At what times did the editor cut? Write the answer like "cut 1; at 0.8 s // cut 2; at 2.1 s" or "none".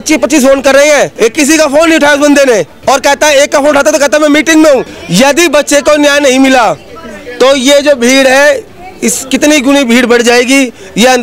cut 1; at 1.1 s // cut 2; at 2.7 s // cut 3; at 4.9 s